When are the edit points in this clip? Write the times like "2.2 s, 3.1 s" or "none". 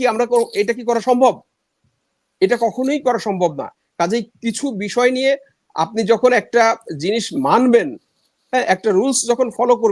none